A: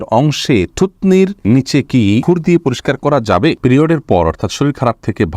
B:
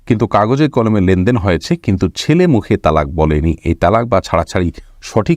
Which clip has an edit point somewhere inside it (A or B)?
A